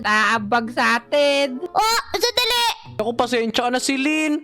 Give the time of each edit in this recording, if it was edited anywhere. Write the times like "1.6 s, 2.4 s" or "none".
2.9 s